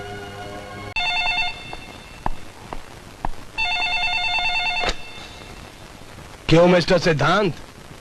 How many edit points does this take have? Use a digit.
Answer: 1